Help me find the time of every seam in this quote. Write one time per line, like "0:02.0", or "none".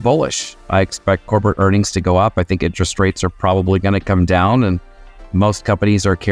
0:01.0